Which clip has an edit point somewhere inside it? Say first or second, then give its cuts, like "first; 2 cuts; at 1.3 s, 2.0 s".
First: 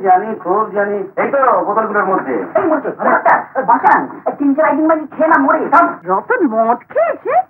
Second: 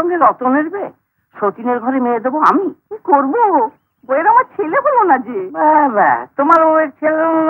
first; 1 cut; at 6.0 s